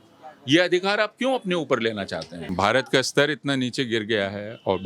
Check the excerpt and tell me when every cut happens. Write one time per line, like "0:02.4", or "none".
0:02.4